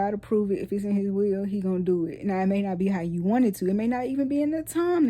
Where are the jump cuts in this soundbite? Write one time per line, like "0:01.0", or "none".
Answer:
none